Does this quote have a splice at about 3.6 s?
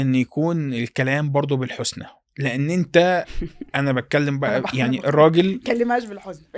no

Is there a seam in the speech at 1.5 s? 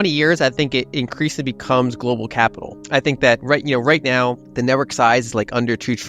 no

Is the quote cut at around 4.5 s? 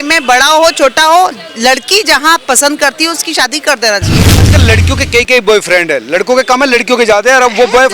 yes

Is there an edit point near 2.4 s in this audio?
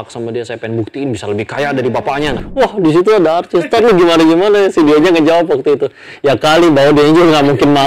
yes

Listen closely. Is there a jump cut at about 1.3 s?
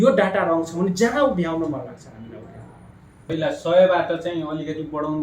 no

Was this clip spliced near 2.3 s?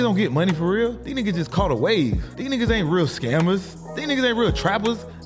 yes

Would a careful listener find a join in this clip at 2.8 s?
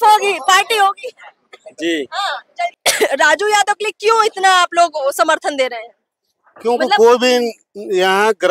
yes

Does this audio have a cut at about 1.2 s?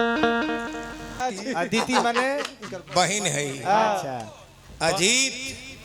yes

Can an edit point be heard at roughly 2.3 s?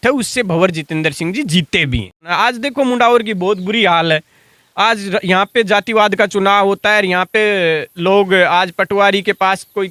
yes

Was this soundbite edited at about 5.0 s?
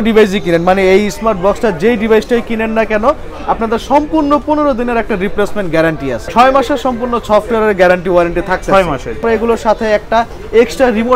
no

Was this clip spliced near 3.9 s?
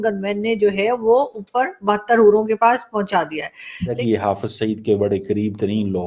yes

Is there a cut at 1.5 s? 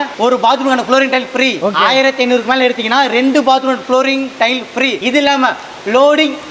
no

